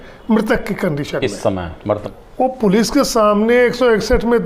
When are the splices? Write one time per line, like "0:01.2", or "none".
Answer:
0:02.1